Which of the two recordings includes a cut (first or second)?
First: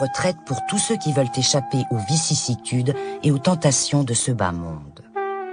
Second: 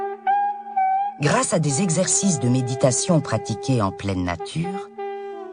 second